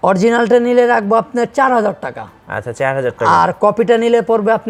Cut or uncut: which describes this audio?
uncut